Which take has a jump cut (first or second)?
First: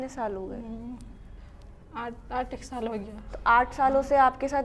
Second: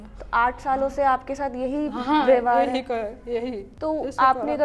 second